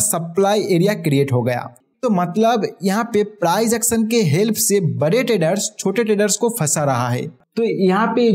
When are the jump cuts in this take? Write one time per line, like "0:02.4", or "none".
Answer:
0:01.8
0:07.4